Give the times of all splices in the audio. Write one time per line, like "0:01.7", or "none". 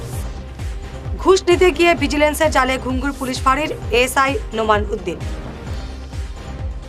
none